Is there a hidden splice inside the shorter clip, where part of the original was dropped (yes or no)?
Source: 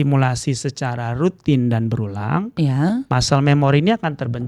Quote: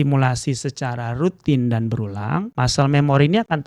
yes